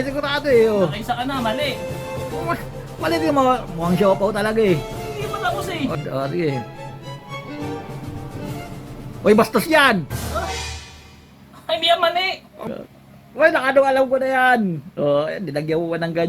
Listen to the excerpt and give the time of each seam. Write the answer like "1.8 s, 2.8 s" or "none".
6.0 s, 12.6 s